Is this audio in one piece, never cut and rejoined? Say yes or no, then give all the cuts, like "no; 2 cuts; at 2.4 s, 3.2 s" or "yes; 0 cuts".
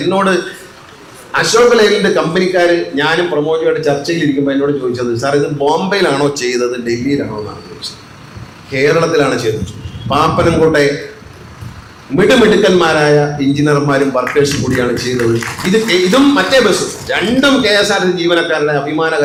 yes; 0 cuts